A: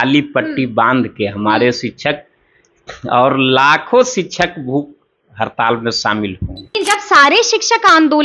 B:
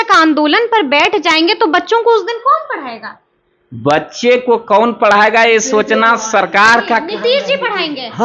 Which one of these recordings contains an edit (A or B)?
A